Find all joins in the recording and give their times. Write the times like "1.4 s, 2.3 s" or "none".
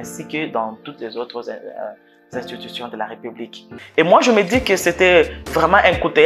3.8 s